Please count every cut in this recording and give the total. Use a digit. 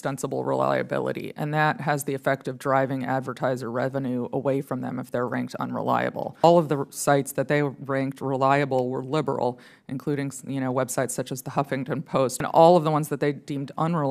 2